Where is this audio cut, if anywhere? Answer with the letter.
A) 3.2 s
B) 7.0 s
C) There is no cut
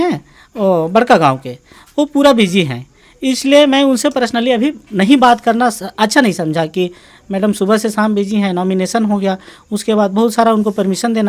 C